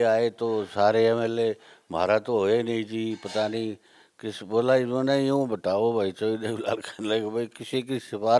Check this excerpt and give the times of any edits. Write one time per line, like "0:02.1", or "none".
none